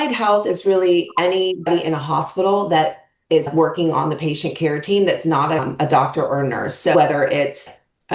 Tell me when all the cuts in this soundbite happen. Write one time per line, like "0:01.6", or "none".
0:01.7
0:03.5
0:05.7